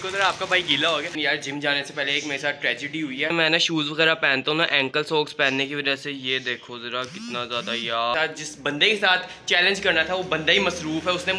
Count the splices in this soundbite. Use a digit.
3